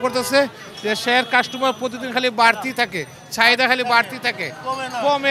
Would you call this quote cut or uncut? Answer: uncut